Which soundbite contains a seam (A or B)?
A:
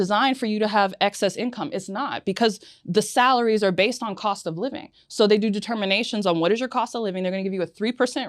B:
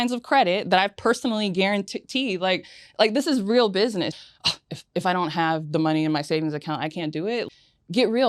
B